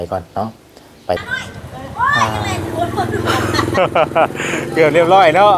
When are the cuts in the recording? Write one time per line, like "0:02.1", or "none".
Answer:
0:01.2